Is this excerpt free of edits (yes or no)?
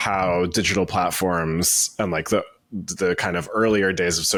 yes